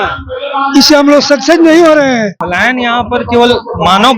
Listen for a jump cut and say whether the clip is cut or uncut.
cut